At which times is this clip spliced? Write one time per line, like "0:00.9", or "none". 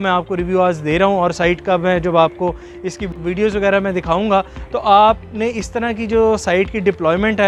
none